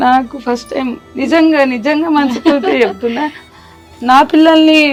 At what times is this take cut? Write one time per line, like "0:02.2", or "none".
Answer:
none